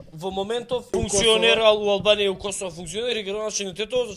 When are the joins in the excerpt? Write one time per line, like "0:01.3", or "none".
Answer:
0:00.9